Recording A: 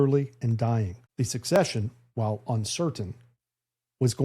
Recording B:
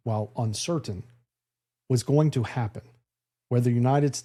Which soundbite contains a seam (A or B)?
A